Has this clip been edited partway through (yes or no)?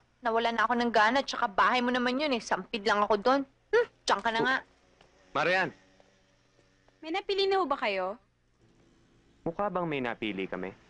yes